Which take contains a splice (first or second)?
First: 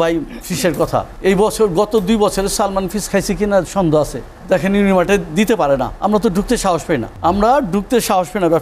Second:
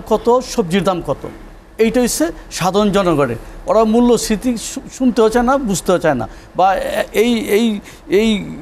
first